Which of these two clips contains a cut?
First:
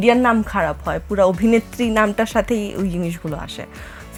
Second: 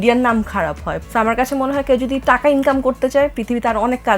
second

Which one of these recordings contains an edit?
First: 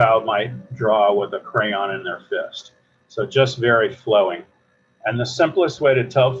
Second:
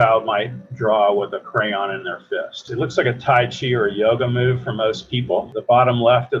second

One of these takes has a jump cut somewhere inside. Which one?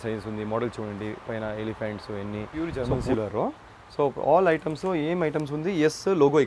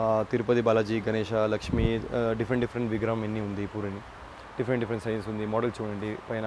first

